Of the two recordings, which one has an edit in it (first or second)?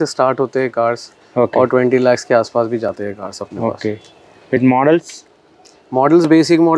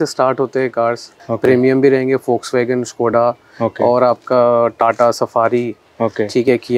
second